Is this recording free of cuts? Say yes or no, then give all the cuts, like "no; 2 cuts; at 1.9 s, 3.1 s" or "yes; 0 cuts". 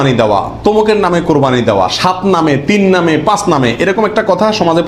yes; 0 cuts